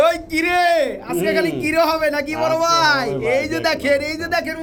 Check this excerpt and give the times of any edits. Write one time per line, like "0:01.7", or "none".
none